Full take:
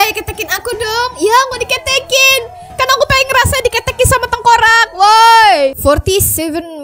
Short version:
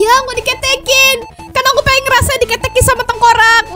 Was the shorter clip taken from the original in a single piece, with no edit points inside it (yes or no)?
yes